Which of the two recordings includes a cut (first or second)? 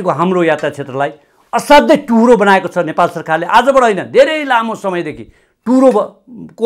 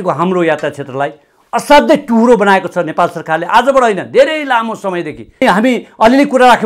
second